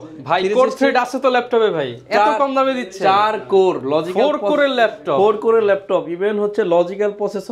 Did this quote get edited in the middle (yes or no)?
no